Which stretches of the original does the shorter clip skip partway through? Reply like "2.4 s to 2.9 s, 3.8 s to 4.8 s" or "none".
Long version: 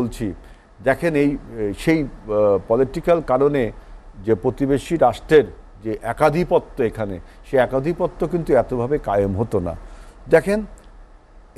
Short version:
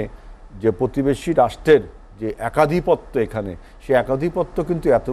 none